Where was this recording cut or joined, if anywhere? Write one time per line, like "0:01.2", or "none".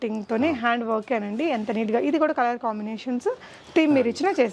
none